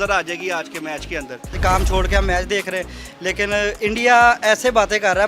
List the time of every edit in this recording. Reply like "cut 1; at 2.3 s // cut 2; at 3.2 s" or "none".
cut 1; at 1.6 s